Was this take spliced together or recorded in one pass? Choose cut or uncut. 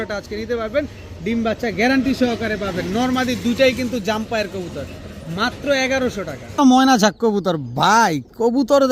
cut